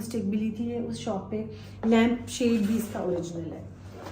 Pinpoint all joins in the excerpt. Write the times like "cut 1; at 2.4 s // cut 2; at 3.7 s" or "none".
cut 1; at 1.7 s